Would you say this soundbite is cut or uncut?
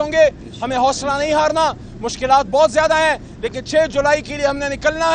uncut